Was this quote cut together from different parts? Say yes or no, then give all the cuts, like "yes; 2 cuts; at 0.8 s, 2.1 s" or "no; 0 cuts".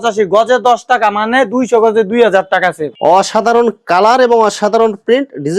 yes; 1 cut; at 2.9 s